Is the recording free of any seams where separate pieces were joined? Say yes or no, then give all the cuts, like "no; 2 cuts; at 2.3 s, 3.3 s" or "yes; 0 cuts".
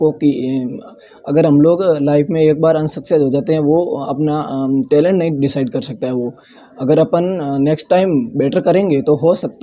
yes; 0 cuts